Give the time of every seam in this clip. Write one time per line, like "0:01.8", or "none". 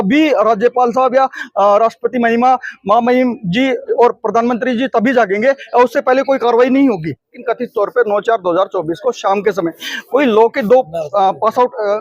0:07.4